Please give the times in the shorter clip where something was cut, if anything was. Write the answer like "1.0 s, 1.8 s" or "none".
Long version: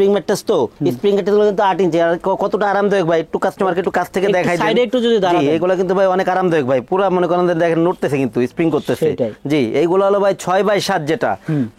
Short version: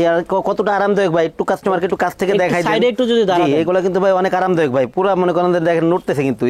none